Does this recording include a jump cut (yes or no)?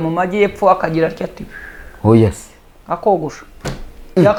no